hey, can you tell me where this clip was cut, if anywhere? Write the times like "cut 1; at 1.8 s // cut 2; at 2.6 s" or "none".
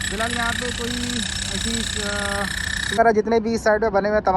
cut 1; at 3.0 s

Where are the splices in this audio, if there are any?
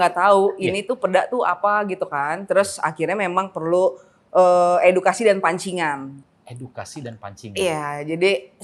none

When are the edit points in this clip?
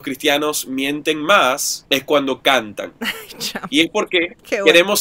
none

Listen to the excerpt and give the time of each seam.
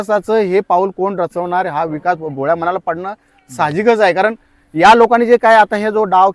none

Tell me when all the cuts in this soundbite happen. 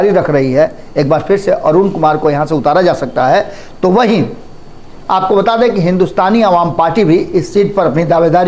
none

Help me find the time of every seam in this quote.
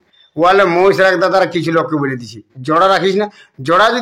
none

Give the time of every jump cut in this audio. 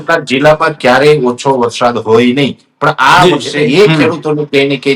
cut 1; at 3.5 s

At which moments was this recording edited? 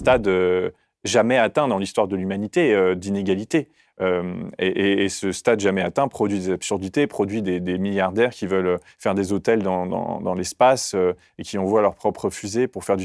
none

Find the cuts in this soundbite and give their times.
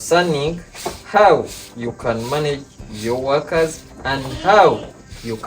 none

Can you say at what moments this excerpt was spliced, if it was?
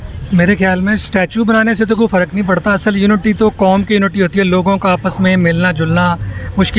none

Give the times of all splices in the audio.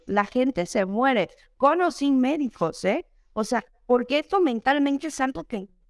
none

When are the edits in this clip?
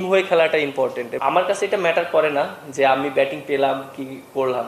cut 1; at 1.1 s

